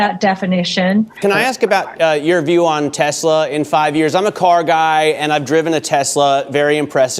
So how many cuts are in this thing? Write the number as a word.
one